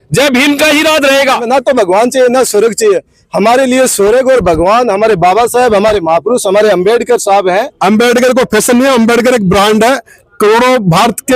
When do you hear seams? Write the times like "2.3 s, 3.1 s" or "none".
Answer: 1.4 s, 7.7 s